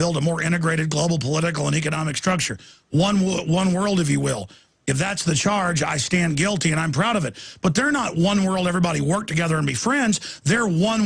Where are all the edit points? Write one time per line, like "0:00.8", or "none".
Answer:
0:05.7